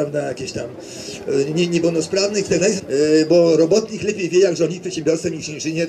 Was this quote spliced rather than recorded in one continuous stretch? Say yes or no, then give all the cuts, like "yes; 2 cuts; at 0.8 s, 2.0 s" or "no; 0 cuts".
yes; 1 cut; at 2.8 s